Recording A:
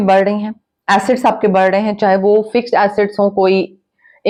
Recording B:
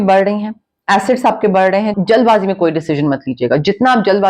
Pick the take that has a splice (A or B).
B